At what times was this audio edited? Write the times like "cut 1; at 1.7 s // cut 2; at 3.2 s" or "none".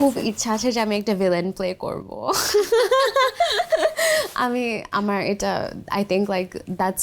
none